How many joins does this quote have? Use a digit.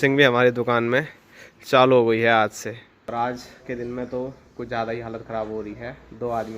1